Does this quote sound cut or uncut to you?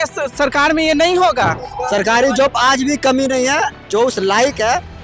cut